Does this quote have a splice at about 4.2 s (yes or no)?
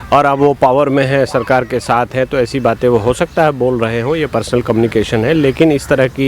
no